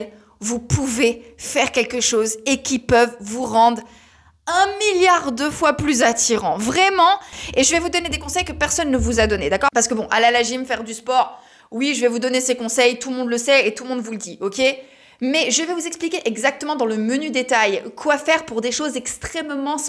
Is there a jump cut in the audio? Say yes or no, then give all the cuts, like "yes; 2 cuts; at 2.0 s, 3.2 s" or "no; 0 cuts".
yes; 2 cuts; at 7.4 s, 9.9 s